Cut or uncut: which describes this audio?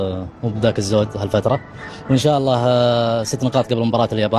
uncut